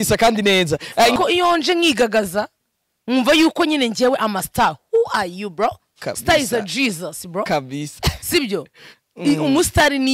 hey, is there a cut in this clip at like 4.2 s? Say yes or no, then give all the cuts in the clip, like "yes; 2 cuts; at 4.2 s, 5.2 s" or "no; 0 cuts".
no; 1 cut; at 1.1 s